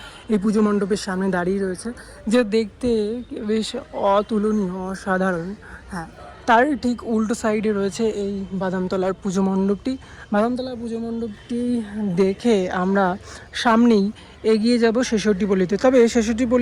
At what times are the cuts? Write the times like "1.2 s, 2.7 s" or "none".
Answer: none